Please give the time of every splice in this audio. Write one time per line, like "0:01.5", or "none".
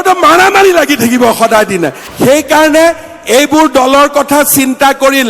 0:02.0